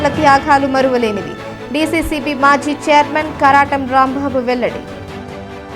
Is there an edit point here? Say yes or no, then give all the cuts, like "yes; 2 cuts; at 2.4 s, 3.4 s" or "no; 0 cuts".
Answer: no; 0 cuts